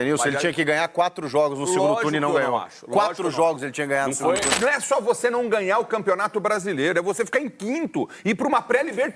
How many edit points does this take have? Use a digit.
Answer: 1